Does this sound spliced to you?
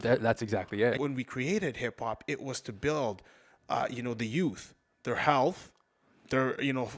yes; 1 cut; at 1.0 s

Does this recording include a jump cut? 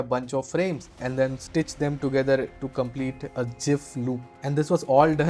no; 0 cuts

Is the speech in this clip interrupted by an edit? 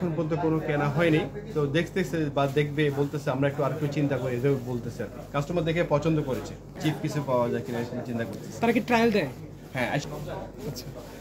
yes; 2 cuts; at 6.7 s, 10.0 s

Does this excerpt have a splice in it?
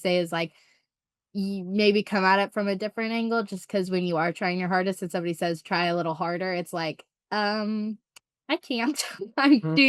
no; 0 cuts

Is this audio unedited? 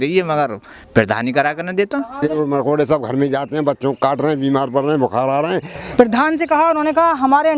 no; 2 cuts; at 2.3 s, 5.8 s

